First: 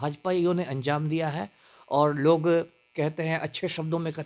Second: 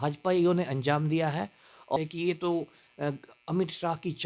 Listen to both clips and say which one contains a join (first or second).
second